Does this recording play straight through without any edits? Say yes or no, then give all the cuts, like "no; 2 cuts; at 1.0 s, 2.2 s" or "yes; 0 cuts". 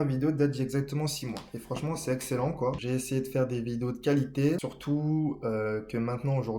no; 2 cuts; at 2.8 s, 4.7 s